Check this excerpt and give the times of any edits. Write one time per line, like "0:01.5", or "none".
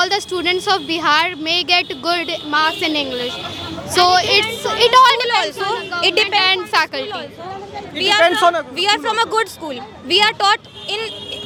none